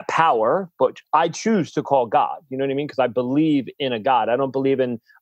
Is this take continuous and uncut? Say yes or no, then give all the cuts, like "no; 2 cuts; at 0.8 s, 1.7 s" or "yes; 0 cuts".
yes; 0 cuts